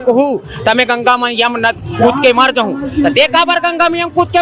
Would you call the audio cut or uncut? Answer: uncut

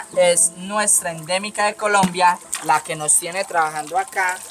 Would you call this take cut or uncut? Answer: uncut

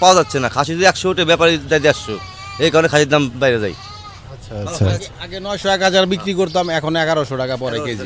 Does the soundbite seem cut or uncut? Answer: uncut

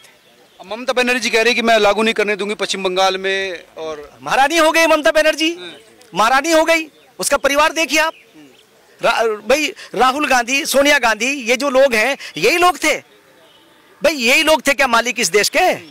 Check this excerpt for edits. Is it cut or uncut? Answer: uncut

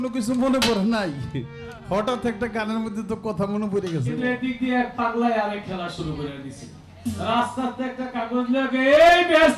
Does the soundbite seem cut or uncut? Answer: cut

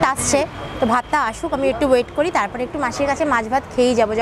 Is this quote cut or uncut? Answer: uncut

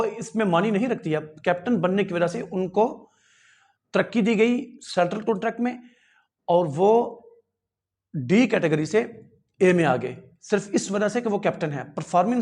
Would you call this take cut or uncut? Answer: uncut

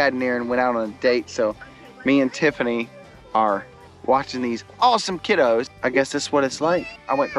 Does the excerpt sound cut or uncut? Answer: uncut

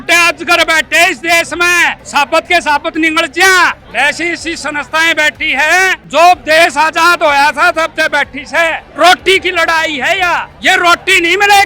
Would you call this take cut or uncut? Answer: cut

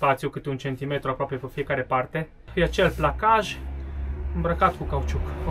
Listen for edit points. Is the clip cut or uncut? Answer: cut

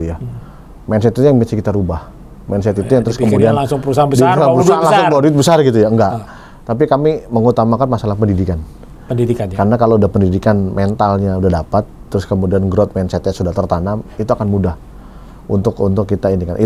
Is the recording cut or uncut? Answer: uncut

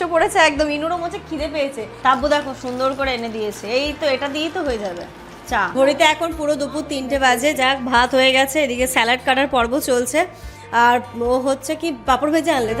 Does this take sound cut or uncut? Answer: cut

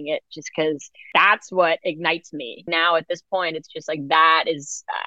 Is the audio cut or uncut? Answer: cut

